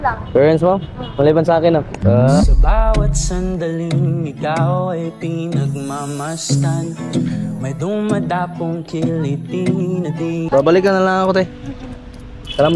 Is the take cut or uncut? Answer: cut